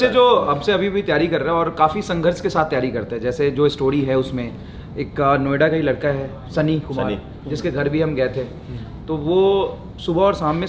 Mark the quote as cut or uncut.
uncut